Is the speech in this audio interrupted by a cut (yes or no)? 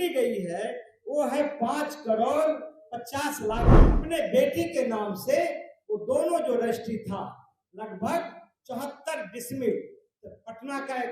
yes